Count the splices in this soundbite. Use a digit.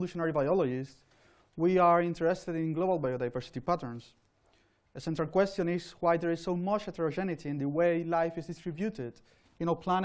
0